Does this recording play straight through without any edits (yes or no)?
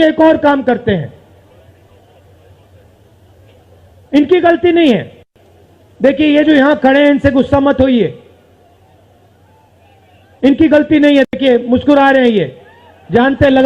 yes